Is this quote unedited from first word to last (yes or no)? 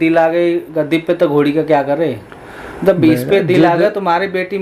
yes